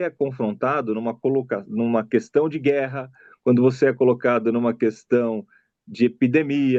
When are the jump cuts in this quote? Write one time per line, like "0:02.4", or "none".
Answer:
none